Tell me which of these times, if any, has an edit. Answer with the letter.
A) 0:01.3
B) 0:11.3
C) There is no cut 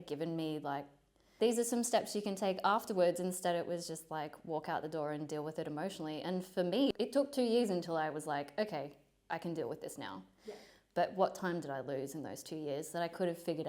A